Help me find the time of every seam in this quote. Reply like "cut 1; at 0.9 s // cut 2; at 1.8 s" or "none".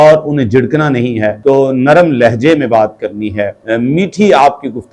cut 1; at 1.4 s // cut 2; at 3.6 s